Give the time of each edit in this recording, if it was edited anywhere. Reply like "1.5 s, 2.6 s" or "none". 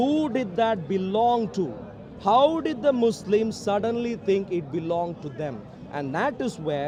none

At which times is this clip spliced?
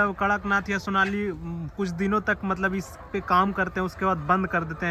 none

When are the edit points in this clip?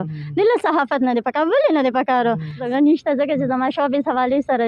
2.6 s

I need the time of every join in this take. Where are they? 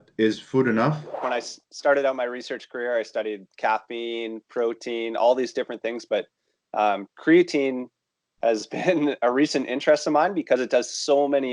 1.2 s

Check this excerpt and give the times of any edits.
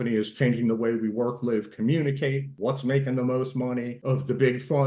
2.5 s, 3.9 s

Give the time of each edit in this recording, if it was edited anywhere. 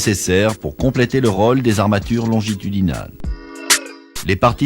3.6 s

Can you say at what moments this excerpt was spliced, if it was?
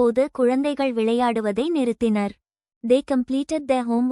2.7 s

